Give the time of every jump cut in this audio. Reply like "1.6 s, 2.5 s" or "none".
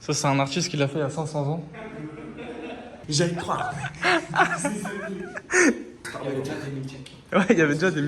2.9 s, 6.0 s